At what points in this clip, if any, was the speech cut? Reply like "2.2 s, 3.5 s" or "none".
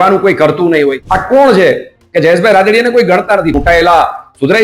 1.1 s, 3.5 s